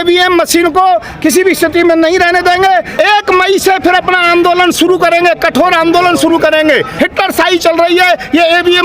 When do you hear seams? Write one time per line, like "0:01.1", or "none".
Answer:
0:02.9
0:06.9